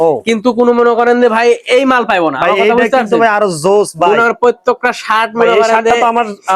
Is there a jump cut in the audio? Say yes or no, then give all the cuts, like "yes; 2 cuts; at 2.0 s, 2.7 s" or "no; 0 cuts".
no; 0 cuts